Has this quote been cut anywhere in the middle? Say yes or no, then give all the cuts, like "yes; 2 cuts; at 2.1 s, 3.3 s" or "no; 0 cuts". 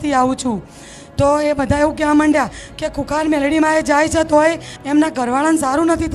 no; 0 cuts